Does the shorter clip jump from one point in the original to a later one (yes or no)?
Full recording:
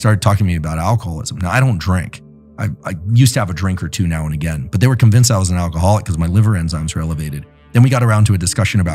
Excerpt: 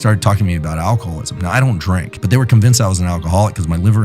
yes